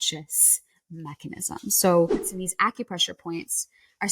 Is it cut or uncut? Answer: cut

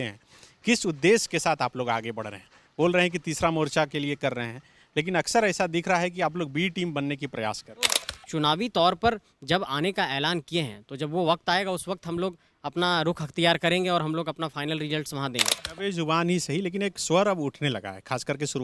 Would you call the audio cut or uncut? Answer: cut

